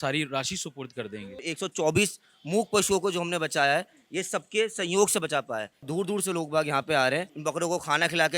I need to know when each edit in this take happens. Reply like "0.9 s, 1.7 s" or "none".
1.4 s, 5.9 s, 7.3 s